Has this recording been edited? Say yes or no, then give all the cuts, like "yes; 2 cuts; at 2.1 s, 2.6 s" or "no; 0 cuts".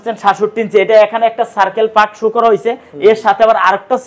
no; 0 cuts